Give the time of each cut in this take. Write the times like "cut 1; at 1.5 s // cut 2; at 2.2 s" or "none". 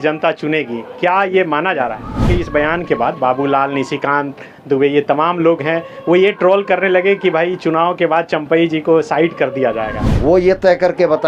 cut 1; at 2.1 s // cut 2; at 10.0 s